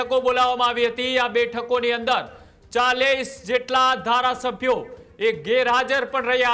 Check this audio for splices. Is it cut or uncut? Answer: uncut